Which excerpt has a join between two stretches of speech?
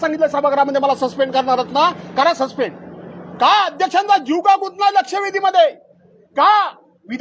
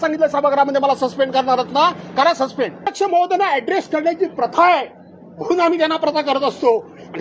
second; 1 cut; at 2.9 s

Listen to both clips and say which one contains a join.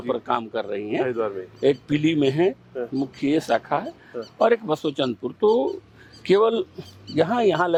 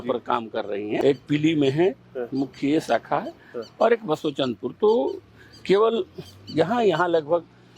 second; 1 cut; at 1.0 s

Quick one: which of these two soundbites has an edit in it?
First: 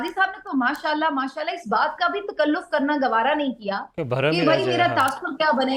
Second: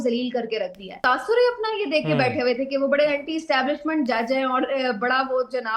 second; 1 cut; at 0.9 s

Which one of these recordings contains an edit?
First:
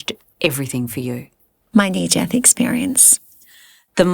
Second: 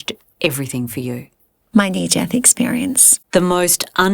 second; 1 cut; at 3.1 s

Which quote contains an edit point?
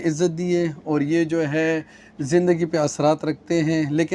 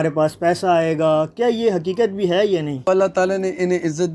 second; 1 cut; at 2.8 s

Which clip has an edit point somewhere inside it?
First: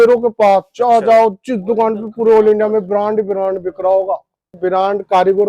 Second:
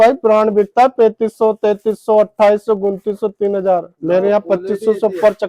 first; 1 cut; at 4.5 s

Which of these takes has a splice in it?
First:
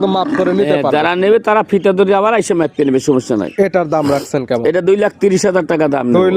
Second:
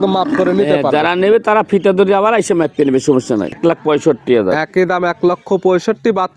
second; 1 cut; at 3.5 s

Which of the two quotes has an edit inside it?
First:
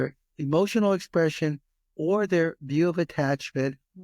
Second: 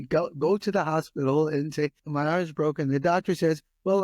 second; 1 cut; at 2.0 s

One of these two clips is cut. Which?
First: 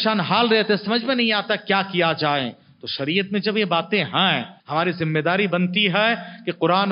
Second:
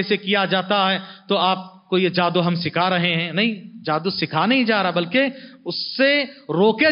first; 1 cut; at 4.5 s

